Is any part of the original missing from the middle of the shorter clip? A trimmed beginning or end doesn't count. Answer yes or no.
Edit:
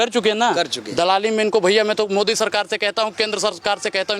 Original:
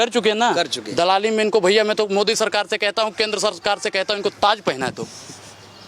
no